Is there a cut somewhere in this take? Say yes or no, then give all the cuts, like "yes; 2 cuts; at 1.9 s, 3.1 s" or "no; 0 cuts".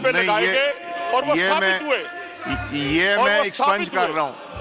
no; 0 cuts